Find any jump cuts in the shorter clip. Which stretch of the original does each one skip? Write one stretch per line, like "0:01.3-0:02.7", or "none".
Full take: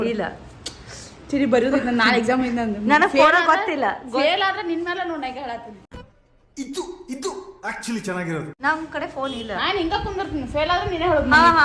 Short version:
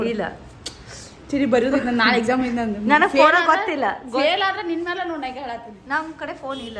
0:05.8-0:08.5